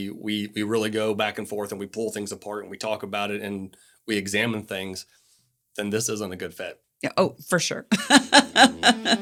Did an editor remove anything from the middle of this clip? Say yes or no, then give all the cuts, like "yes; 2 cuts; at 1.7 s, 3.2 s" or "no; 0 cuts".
no; 0 cuts